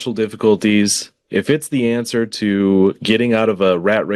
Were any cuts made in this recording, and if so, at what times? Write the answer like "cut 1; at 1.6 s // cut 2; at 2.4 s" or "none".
none